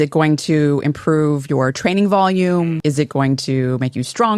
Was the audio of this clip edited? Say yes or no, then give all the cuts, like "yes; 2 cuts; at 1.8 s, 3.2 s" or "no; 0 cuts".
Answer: yes; 1 cut; at 2.8 s